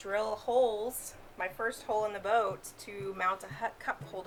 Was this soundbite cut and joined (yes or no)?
no